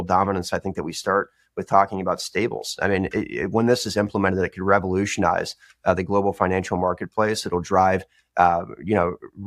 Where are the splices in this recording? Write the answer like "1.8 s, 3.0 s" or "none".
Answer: none

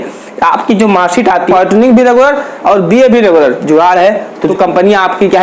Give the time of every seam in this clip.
1.5 s, 4.4 s

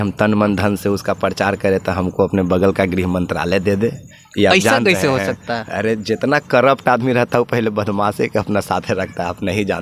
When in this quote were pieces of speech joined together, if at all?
none

